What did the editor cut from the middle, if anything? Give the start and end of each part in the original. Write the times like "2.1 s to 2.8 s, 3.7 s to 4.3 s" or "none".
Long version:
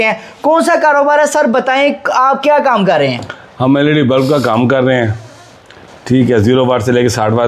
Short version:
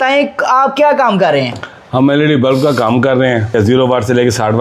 5.2 s to 6.3 s